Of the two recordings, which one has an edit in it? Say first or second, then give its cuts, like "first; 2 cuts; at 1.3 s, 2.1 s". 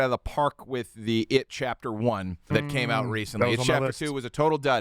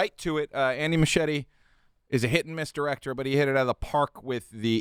first; 1 cut; at 2.5 s